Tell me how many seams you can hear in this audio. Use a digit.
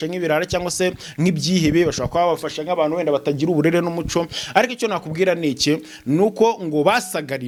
0